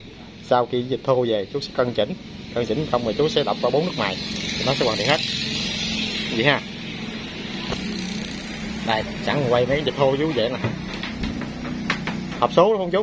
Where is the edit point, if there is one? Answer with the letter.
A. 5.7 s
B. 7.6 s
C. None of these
C